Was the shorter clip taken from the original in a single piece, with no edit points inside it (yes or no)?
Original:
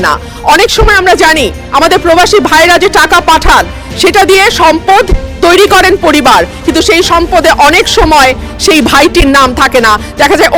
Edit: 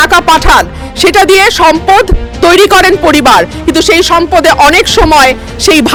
yes